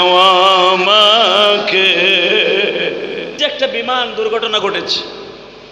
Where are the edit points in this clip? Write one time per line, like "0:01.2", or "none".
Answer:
0:03.3